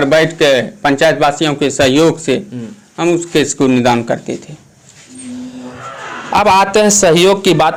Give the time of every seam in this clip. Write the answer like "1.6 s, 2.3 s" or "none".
none